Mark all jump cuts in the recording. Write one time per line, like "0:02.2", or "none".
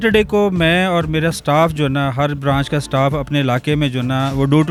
none